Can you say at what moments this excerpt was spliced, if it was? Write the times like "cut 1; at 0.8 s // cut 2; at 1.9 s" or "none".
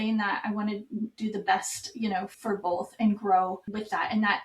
cut 1; at 2.3 s // cut 2; at 3.7 s